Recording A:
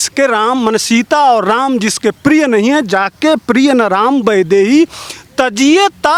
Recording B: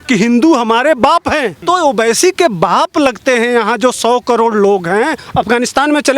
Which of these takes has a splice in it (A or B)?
B